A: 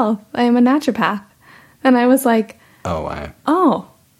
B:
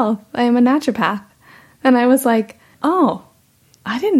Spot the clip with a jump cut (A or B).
B